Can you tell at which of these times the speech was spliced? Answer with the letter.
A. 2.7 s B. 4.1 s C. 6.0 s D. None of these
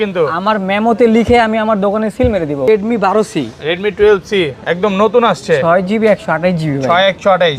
A